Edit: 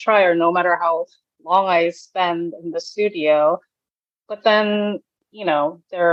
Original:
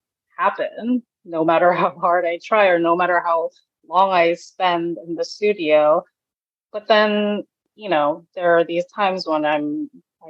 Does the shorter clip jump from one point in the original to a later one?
no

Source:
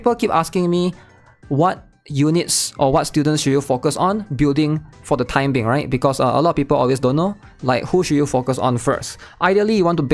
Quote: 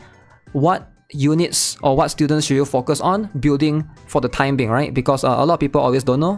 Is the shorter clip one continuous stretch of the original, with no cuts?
yes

